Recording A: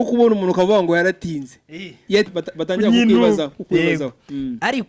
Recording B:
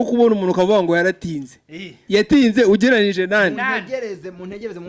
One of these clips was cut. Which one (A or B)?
A